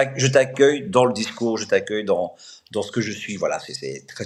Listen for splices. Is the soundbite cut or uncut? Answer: uncut